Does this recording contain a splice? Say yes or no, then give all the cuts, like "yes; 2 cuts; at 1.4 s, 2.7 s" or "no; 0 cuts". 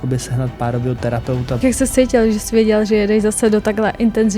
yes; 1 cut; at 1.6 s